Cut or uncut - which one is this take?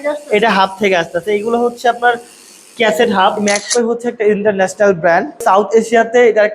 cut